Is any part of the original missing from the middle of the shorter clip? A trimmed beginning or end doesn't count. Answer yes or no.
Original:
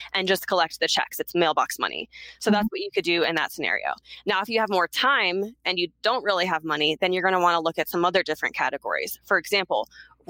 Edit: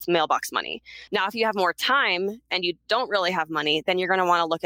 yes